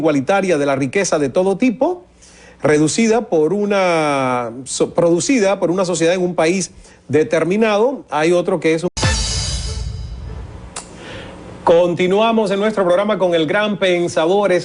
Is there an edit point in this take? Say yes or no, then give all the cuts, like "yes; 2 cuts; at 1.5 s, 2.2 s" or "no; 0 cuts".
no; 0 cuts